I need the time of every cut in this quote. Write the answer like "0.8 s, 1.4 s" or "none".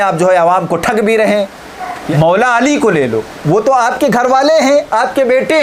2.0 s